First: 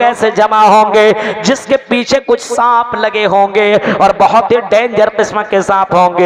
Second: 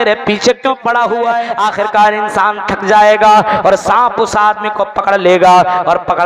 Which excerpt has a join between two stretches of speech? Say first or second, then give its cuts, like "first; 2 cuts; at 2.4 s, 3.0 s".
second; 1 cut; at 1.5 s